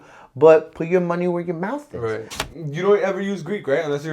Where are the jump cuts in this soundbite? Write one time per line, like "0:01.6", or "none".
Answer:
0:02.4